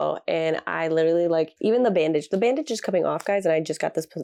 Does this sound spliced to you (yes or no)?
no